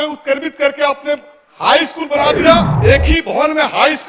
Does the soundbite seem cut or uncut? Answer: cut